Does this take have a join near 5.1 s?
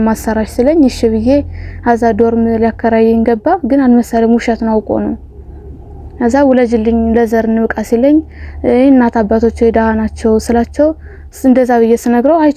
no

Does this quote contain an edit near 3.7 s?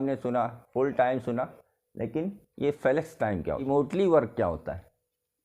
yes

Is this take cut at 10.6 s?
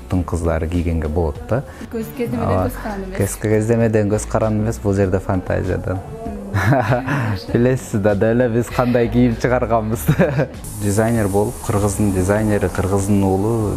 yes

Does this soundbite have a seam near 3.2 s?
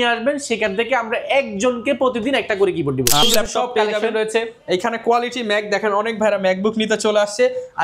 yes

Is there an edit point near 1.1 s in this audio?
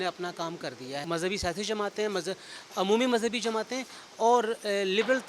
yes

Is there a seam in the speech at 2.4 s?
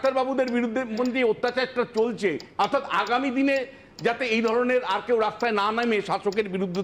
yes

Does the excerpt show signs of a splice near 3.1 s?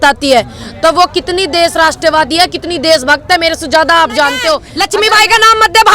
no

